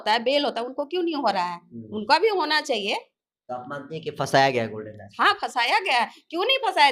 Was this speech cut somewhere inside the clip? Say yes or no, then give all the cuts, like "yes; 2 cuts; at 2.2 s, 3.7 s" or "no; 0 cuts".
no; 0 cuts